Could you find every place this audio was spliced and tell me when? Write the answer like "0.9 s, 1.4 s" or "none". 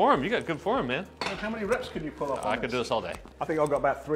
none